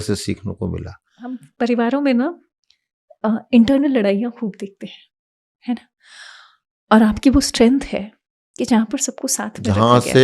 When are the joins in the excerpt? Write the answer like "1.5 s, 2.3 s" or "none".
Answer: 1.5 s